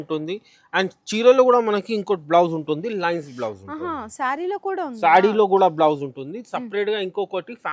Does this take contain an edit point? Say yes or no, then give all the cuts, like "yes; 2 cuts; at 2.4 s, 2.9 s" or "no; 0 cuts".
no; 0 cuts